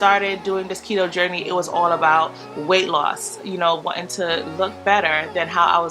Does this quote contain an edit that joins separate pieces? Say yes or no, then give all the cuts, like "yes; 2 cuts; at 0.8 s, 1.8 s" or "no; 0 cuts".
no; 0 cuts